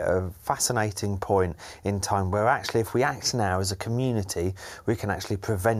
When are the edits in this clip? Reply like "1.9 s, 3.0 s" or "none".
none